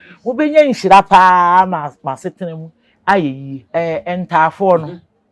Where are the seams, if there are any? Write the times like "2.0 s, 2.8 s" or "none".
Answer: 3.6 s